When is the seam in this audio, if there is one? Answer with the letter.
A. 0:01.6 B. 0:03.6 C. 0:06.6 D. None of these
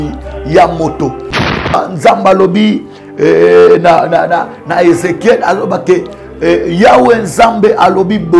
A